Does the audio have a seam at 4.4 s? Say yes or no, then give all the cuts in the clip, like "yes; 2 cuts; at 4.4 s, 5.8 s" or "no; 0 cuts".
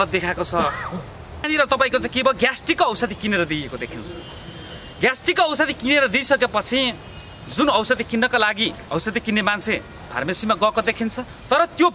no; 1 cut; at 1.4 s